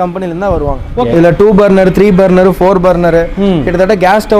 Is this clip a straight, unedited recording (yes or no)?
no